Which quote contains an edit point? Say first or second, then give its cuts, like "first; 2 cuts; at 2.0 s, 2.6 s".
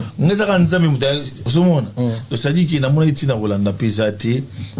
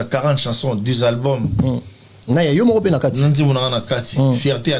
first; 1 cut; at 1.3 s